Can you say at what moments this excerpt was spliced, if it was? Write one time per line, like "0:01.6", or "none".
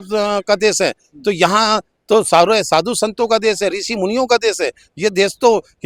none